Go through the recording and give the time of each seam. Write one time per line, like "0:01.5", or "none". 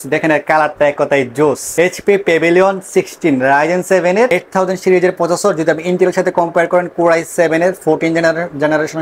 none